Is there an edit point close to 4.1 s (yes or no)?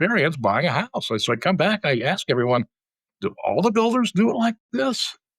no